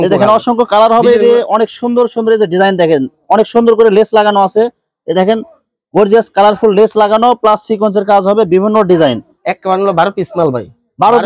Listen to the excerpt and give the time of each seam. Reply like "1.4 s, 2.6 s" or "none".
9.4 s